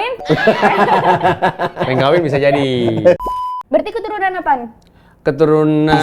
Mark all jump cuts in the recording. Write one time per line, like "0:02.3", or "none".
0:03.2